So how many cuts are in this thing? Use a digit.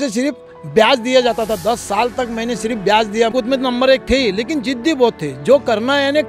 1